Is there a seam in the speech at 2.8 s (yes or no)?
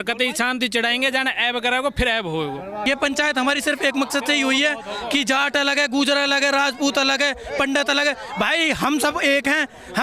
yes